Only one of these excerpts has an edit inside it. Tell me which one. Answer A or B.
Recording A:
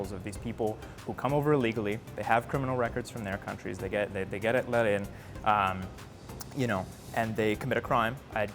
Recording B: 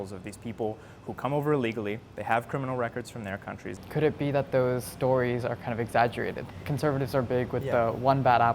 B